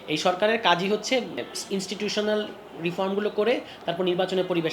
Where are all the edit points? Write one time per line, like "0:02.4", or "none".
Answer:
0:01.5